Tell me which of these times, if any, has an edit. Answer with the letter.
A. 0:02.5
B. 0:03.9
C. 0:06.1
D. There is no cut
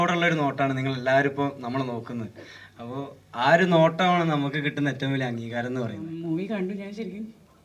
C